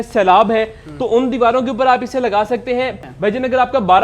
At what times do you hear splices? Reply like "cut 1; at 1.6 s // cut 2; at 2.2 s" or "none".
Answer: cut 1; at 3.0 s